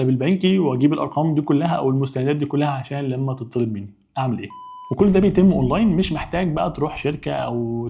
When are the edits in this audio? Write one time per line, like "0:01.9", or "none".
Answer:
0:04.8

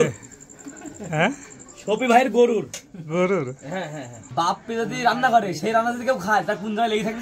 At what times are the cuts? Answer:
0:04.2

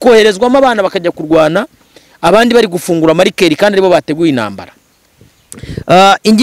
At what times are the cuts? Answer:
none

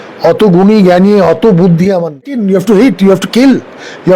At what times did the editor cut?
0:02.4

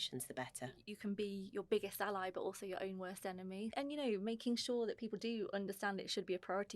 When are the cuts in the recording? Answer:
0:00.9
0:03.7

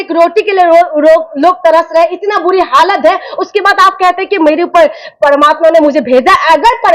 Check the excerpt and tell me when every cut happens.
0:00.9

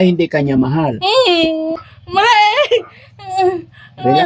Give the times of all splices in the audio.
0:01.7

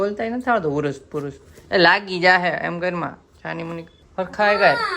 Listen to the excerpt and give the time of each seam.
0:04.0

